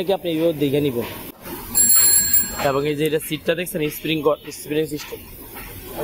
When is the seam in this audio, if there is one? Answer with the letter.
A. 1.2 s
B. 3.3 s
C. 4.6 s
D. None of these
A